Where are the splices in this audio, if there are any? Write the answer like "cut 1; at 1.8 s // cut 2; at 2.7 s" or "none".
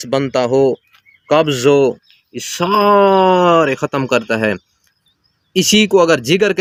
none